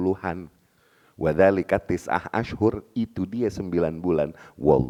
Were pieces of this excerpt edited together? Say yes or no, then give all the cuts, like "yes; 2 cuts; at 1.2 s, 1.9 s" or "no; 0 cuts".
no; 0 cuts